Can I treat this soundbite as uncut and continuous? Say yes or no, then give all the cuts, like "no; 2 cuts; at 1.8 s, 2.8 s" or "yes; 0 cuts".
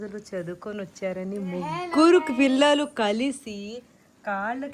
yes; 0 cuts